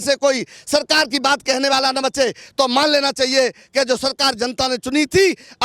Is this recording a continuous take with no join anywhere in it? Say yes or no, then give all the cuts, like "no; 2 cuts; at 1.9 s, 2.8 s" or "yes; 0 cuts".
yes; 0 cuts